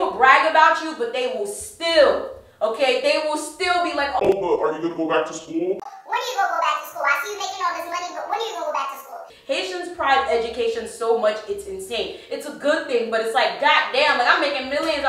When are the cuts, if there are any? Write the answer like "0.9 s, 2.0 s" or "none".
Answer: none